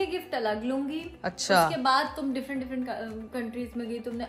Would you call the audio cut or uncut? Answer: uncut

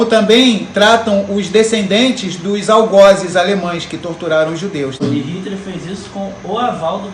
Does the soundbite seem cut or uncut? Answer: cut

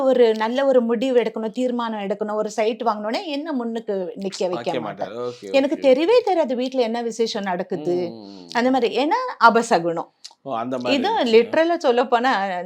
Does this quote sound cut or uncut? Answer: uncut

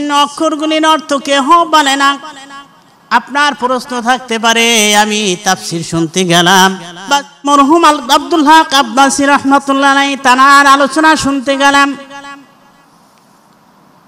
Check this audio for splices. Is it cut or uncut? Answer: cut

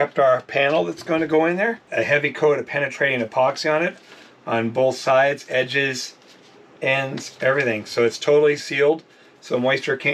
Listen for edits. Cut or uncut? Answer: cut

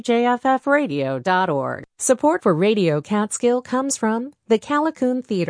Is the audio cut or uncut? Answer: cut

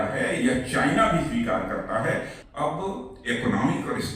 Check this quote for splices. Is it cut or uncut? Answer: cut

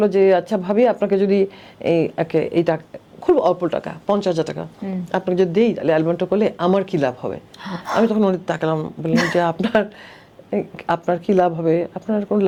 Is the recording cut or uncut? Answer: uncut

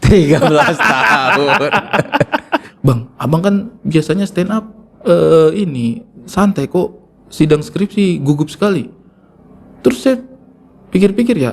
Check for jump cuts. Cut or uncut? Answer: cut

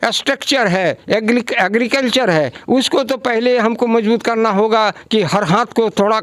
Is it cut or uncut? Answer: uncut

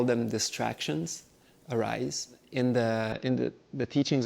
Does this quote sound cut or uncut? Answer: cut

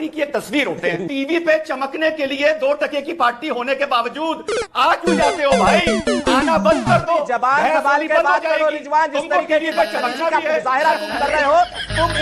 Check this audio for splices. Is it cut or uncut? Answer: cut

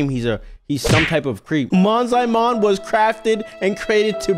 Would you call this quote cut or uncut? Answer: cut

